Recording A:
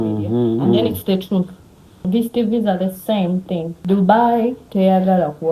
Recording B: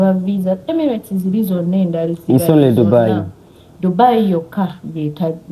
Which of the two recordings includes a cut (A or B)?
A